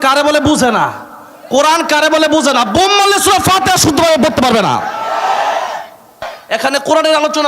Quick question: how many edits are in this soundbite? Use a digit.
1